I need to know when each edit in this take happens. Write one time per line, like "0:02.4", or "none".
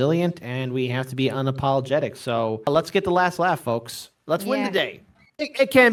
none